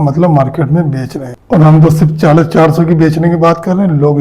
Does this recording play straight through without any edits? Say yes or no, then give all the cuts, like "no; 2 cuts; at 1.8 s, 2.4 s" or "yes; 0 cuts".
no; 1 cut; at 1.4 s